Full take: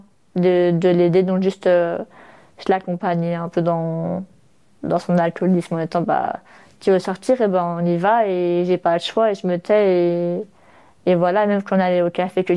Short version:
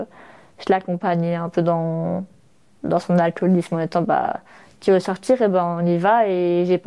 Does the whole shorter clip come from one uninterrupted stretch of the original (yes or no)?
yes